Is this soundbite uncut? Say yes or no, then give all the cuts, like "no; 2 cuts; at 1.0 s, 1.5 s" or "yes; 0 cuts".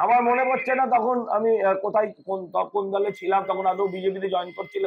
yes; 0 cuts